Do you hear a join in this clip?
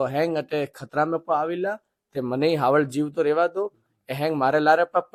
no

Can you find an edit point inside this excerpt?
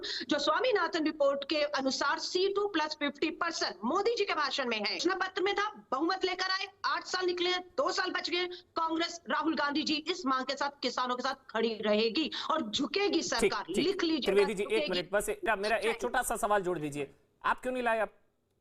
yes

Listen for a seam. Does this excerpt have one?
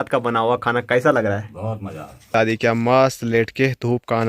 yes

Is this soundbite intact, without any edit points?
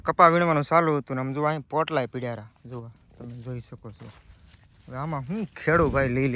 yes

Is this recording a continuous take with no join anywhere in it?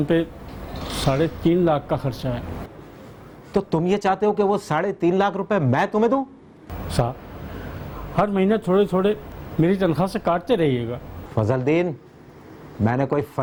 yes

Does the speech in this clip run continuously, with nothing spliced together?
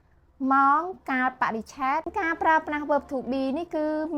no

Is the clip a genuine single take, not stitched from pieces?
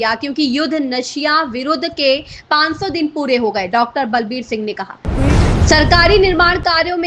no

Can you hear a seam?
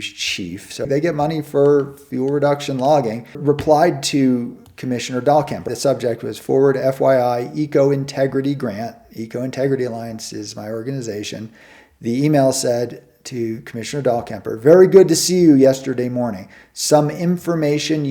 yes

